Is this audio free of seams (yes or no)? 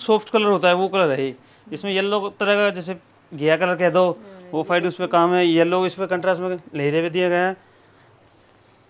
yes